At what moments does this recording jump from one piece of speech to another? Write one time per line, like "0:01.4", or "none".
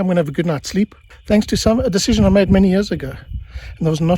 0:01.1